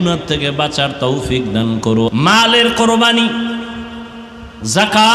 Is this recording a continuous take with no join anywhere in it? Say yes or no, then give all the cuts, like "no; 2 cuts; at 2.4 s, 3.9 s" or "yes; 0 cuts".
no; 1 cut; at 2.1 s